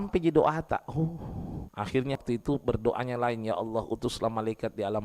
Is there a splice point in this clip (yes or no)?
yes